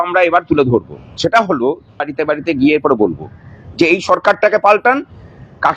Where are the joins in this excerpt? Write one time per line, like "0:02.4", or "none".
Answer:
0:02.1

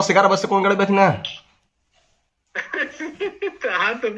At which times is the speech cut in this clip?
none

